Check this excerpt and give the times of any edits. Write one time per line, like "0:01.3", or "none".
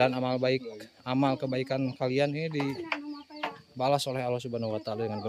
none